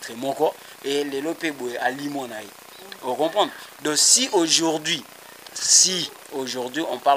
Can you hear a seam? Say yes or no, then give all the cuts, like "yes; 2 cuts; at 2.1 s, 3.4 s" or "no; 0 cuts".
no; 0 cuts